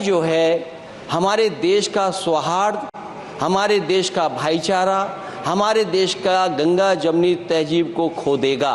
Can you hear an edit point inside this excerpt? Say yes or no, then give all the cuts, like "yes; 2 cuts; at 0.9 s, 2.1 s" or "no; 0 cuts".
no; 0 cuts